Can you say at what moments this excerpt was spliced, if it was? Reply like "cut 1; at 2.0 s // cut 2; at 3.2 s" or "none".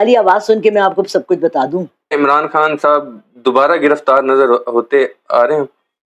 cut 1; at 2.1 s